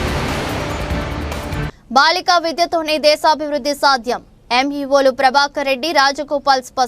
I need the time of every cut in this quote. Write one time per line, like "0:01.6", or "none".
0:01.7